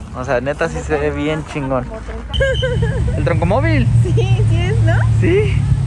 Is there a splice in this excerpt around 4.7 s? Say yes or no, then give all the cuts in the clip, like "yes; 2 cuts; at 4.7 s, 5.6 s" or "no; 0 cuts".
no; 1 cut; at 2.3 s